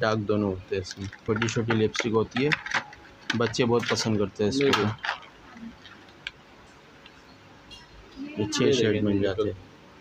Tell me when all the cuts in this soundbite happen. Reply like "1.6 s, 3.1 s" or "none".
1.2 s

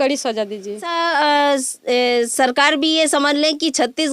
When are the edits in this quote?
0.9 s

